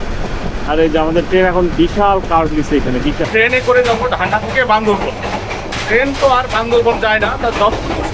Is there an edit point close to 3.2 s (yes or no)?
yes